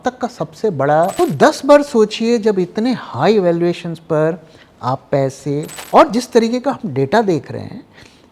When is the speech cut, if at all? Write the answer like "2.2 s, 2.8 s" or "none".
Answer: 1.1 s, 5.8 s